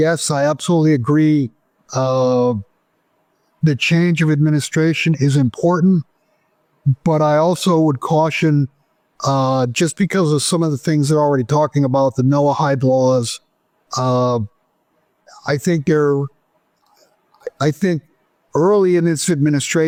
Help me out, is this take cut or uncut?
uncut